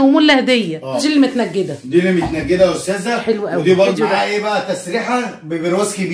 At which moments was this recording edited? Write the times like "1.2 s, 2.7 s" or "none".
1.0 s, 3.9 s